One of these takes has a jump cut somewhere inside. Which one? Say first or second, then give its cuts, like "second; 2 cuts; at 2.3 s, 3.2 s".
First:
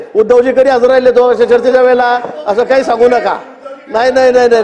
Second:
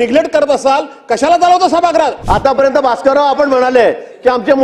second; 1 cut; at 2.2 s